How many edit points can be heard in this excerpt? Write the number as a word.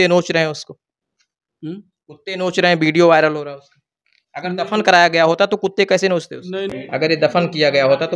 one